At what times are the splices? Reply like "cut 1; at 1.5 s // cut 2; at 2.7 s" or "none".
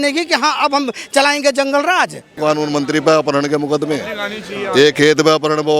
cut 1; at 2.3 s